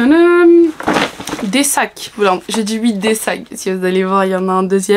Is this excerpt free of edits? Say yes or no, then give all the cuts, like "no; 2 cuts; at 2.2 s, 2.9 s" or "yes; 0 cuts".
yes; 0 cuts